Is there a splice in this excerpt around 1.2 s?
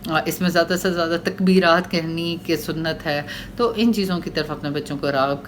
no; 0 cuts

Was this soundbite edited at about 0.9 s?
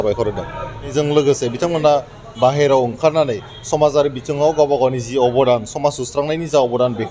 yes; 1 cut; at 0.9 s

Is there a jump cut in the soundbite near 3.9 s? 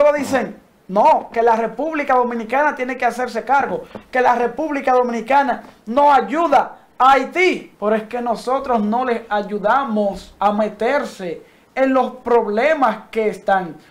no; 2 cuts; at 7.7 s, 10.3 s

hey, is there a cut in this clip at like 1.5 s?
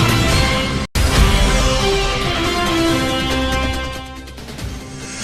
no; 0 cuts

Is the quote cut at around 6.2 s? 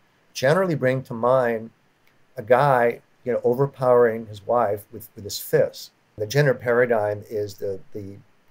yes; 1 cut; at 6.2 s

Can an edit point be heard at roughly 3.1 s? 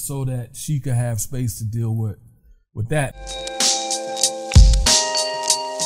yes; 1 cut; at 3.1 s

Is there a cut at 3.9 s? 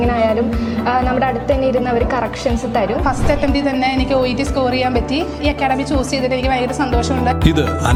no; 0 cuts

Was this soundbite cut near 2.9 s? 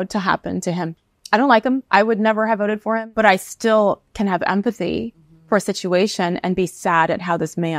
yes; 1 cut; at 2.9 s

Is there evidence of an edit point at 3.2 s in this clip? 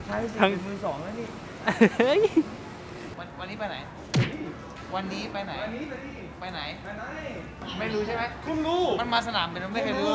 yes; 2 cuts; at 3.2 s, 7.6 s

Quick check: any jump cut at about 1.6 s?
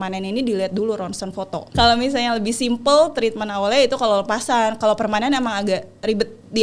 yes; 1 cut; at 1.6 s

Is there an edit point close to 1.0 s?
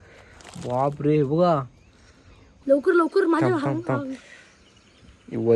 no; 1 cut; at 2.5 s

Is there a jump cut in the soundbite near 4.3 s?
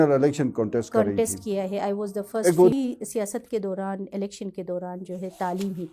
no; 1 cut; at 2.7 s

